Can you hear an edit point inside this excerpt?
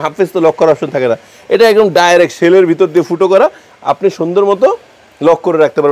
no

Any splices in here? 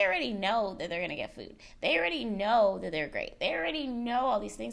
no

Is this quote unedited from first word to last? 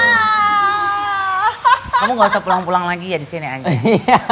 yes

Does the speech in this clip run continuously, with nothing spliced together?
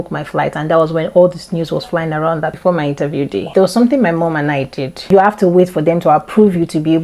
no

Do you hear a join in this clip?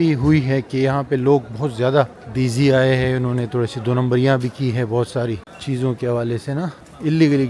no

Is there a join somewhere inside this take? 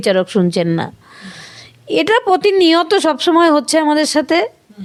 no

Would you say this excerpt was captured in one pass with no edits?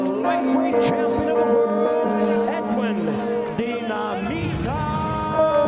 yes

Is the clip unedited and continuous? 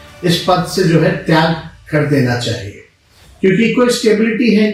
yes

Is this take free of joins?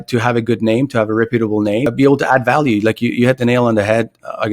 no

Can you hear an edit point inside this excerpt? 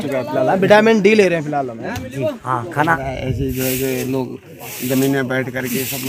yes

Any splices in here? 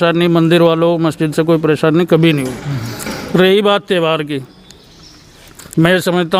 no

